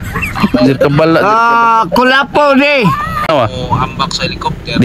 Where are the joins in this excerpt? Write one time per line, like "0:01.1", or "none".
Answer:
0:03.3